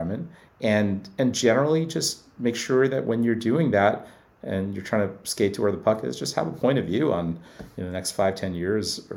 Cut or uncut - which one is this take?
uncut